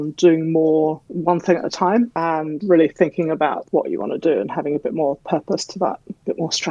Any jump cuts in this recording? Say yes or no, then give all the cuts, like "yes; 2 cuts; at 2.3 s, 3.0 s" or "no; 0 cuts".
yes; 2 cuts; at 2.2 s, 3.6 s